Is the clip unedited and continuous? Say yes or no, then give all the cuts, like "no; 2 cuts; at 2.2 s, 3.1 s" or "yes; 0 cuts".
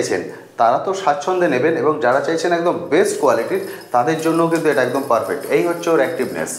yes; 0 cuts